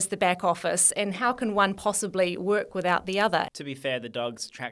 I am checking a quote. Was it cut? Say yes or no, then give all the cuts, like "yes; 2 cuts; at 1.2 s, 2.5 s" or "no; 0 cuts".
yes; 1 cut; at 3.5 s